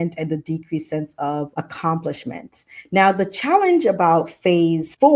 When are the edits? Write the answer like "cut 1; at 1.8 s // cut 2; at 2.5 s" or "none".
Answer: none